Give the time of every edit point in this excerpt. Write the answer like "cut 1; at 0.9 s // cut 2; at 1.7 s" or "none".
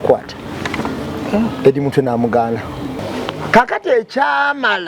cut 1; at 3.0 s